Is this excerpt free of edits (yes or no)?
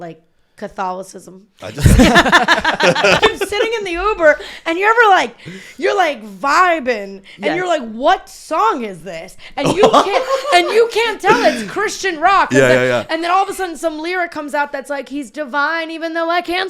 no